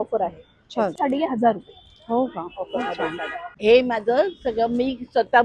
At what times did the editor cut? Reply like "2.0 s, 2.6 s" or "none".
1.0 s, 3.4 s